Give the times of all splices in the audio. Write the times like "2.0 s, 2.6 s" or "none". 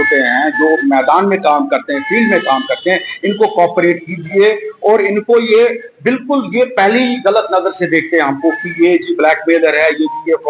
none